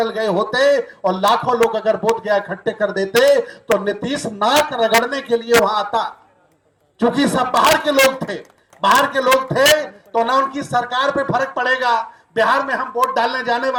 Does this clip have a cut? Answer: no; 0 cuts

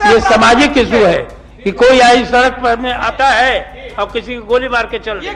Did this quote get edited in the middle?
no; 0 cuts

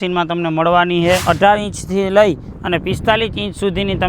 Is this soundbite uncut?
no; 1 cut; at 1.2 s

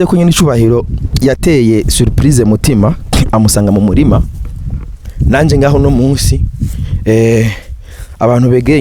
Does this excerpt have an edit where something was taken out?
no; 0 cuts

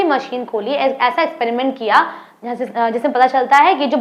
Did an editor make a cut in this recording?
no; 0 cuts

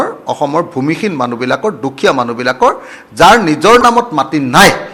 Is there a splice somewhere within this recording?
no; 0 cuts

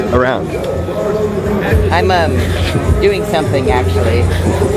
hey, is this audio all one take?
yes; 0 cuts

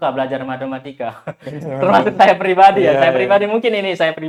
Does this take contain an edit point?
no; 0 cuts

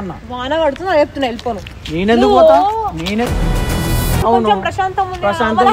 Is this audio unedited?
no; 1 cut; at 4.2 s

